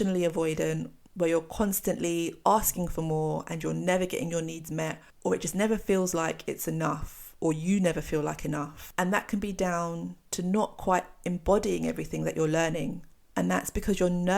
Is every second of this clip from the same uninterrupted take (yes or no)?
no